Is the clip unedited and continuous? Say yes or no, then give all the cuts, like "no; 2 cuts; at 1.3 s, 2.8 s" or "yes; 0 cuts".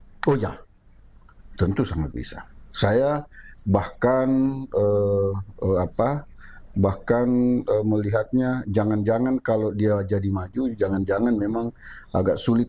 yes; 0 cuts